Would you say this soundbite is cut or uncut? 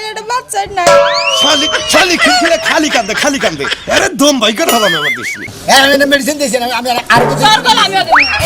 cut